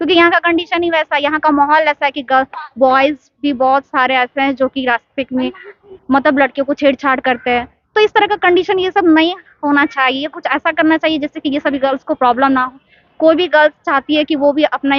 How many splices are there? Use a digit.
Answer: 0